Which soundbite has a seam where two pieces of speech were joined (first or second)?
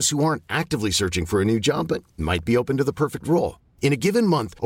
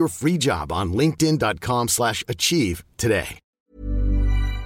second